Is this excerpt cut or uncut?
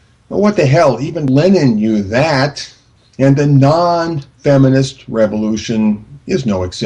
cut